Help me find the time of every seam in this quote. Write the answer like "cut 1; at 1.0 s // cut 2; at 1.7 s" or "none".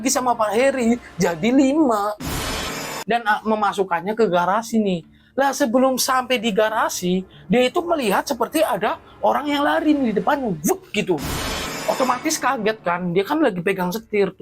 cut 1; at 2.9 s

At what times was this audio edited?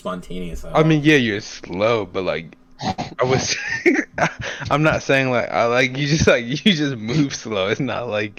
none

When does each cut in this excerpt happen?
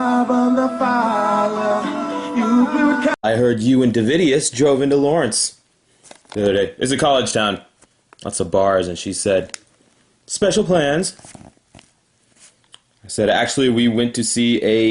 cut 1; at 2.0 s

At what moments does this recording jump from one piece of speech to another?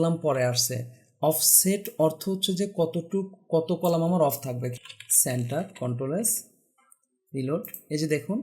cut 1; at 4.7 s

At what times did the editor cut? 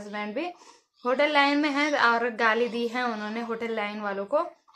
none

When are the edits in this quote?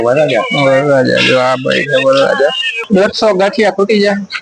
cut 1; at 2.8 s

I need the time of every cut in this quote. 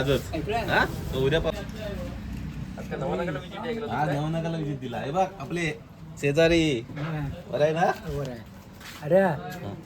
cut 1; at 1.5 s

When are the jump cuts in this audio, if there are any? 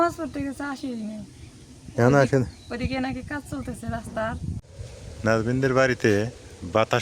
cut 1; at 4.6 s

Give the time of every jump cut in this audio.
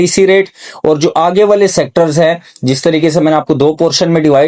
none

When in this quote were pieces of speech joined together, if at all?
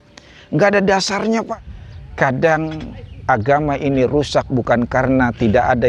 cut 1; at 1.5 s

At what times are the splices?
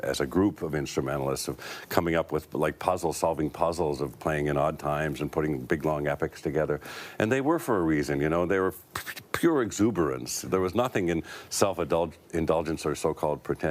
cut 1; at 1.5 s

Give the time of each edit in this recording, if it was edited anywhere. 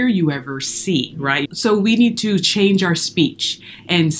cut 1; at 1.5 s

